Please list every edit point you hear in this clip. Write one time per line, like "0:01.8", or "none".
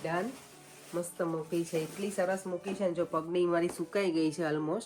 none